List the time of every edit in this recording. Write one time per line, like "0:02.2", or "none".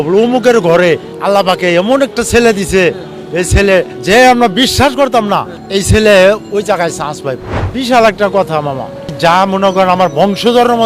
0:01.1
0:03.9
0:05.5
0:07.5
0:09.1